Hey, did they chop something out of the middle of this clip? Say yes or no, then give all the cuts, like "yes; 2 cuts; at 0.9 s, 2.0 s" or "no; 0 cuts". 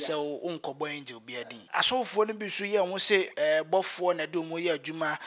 yes; 1 cut; at 1.7 s